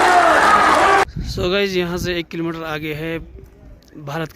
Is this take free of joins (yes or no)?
no